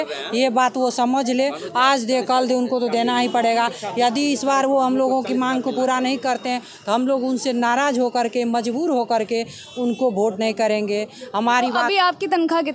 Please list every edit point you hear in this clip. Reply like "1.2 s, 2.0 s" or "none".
none